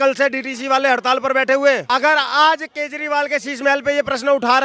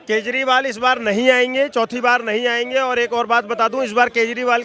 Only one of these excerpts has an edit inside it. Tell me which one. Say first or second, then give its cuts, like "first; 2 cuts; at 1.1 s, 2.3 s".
first; 1 cut; at 1.8 s